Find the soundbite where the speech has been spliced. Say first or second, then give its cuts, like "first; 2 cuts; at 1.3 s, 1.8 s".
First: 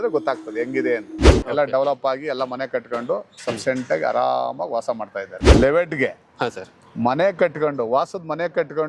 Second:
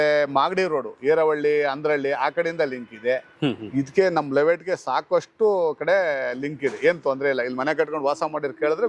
first; 2 cuts; at 1.3 s, 5.3 s